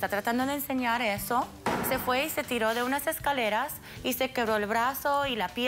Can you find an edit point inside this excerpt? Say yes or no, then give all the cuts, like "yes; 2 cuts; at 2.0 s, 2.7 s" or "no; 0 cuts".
yes; 1 cut; at 1.7 s